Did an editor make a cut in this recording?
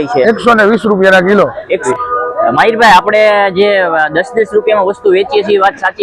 yes; 1 cut; at 1.8 s

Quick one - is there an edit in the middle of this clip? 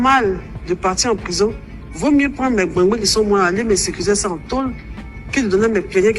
no; 0 cuts

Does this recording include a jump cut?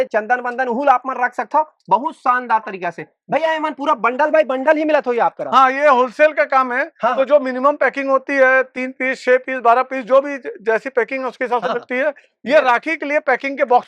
no; 0 cuts

